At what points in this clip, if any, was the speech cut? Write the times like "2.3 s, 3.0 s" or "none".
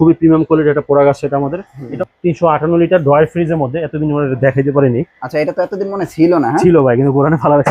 1.8 s